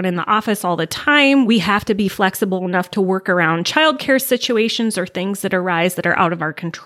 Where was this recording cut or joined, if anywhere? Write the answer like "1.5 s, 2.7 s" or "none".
1.5 s